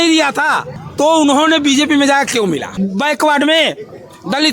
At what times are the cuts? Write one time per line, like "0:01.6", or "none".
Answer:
0:02.7